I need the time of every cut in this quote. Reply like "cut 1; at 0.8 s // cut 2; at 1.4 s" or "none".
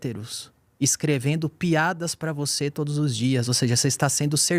none